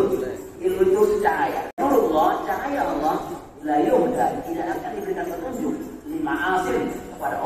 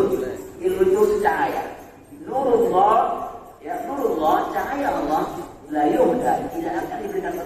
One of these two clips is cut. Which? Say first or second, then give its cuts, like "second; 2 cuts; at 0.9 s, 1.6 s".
first; 1 cut; at 1.7 s